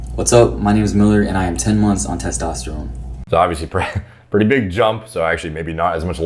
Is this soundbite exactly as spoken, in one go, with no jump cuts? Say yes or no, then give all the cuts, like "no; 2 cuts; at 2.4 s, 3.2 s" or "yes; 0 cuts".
yes; 0 cuts